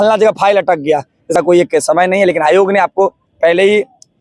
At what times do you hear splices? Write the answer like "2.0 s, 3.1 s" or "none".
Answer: 1.3 s